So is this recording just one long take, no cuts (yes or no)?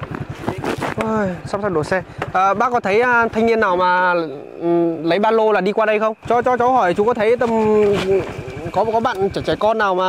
no